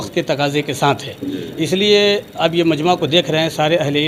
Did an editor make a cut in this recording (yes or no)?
no